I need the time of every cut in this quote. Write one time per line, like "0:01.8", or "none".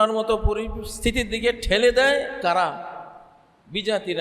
none